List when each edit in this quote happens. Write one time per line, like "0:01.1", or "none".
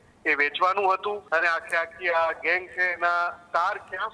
0:01.2